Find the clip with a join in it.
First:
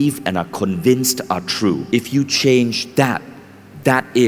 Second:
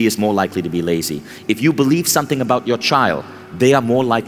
first; 1 cut; at 1.8 s

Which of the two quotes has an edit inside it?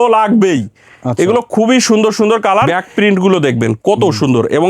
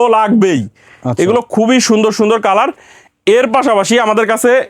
first; 1 cut; at 2.8 s

